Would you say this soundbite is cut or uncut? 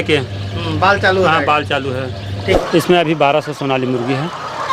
cut